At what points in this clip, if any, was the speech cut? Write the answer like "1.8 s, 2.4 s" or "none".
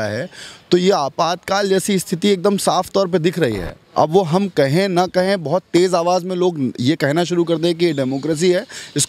none